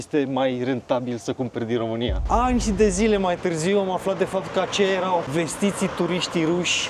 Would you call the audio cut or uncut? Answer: cut